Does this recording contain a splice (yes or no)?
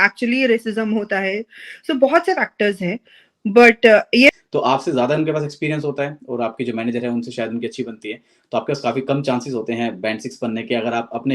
yes